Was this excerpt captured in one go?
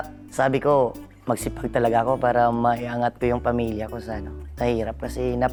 yes; 0 cuts

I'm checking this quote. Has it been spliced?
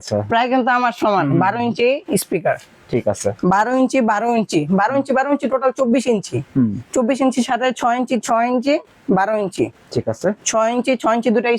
no; 0 cuts

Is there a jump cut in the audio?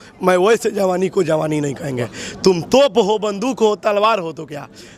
no; 0 cuts

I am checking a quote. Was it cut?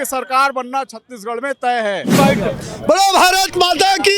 yes; 1 cut; at 2.1 s

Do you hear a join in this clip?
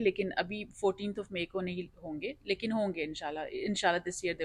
no; 0 cuts

